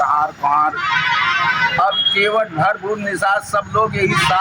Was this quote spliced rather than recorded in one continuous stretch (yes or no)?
no